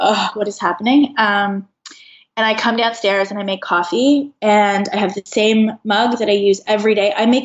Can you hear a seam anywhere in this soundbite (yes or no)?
no